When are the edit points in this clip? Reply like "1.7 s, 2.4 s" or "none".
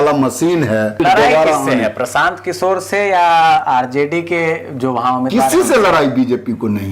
1.0 s